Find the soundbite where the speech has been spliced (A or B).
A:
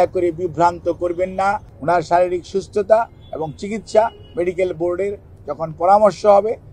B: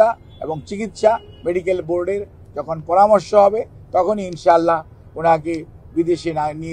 A